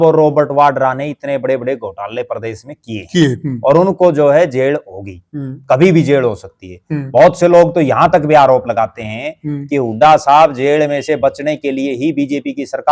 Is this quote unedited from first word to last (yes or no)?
yes